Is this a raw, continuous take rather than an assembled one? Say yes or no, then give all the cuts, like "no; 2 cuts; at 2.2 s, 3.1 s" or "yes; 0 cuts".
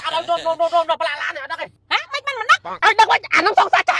no; 1 cut; at 1.7 s